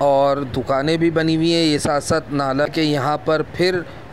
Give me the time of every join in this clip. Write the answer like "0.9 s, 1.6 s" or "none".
2.7 s